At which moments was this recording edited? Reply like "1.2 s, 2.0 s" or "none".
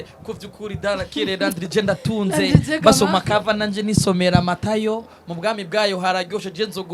none